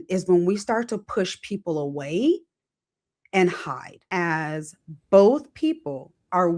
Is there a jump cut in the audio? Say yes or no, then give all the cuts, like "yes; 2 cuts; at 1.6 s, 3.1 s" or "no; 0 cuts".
yes; 1 cut; at 4.1 s